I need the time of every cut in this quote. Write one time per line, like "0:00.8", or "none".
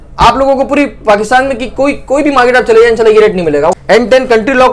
0:03.8